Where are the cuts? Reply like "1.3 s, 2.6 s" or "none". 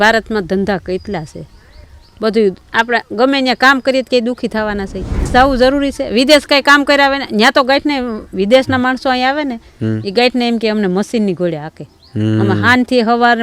5.3 s